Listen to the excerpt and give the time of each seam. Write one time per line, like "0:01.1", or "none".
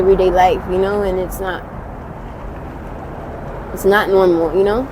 none